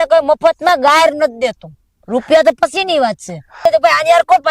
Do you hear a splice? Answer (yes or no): yes